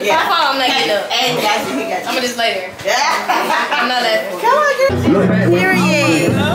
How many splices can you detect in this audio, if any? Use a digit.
1